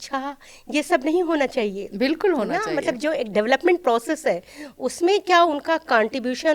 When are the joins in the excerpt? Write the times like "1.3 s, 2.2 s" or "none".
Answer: none